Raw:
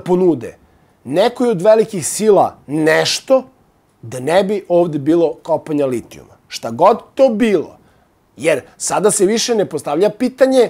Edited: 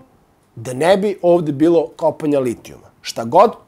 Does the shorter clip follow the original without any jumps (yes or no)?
yes